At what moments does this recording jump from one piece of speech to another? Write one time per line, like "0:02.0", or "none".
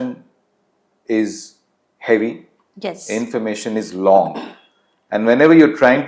none